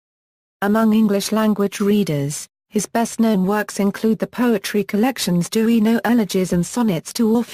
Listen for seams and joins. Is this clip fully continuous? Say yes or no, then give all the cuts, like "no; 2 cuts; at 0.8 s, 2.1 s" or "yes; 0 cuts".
no; 1 cut; at 3.1 s